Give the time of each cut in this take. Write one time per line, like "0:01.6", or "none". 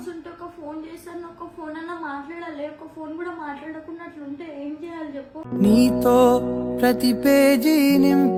none